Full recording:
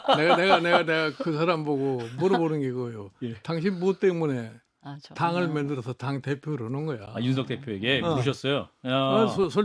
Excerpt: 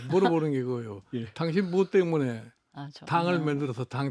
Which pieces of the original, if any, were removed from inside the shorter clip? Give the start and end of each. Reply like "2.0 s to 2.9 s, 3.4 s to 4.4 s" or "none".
none